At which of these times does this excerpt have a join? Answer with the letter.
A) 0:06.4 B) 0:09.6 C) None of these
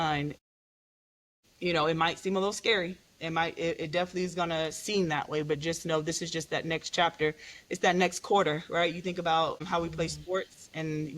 B